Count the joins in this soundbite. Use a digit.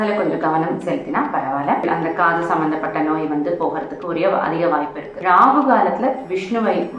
2